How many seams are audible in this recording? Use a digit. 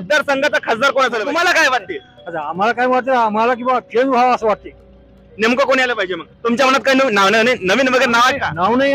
1